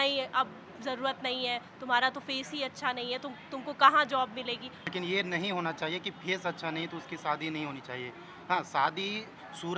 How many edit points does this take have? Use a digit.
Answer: 1